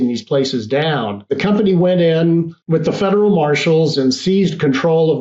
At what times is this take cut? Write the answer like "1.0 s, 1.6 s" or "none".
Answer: 1.3 s, 2.6 s